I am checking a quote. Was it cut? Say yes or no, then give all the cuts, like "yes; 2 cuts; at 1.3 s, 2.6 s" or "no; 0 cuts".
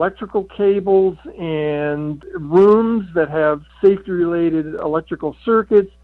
yes; 2 cuts; at 3.7 s, 4.8 s